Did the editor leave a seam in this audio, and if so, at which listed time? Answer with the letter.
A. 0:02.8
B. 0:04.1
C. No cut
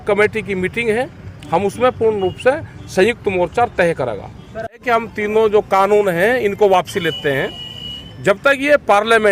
B